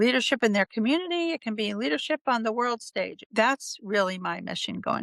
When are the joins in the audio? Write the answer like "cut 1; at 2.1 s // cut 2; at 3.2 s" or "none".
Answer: cut 1; at 3.2 s